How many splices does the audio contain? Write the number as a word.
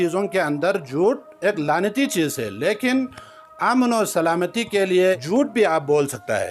one